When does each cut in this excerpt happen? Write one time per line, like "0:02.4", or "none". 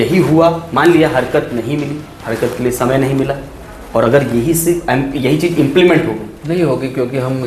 none